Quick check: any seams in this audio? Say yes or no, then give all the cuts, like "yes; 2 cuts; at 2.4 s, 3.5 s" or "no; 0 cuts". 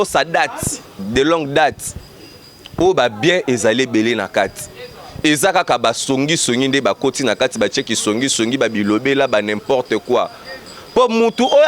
no; 0 cuts